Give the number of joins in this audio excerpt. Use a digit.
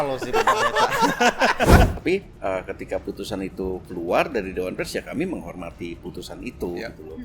1